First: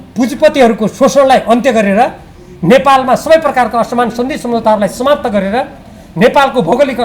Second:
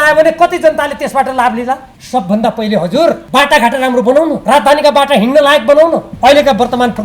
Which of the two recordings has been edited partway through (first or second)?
second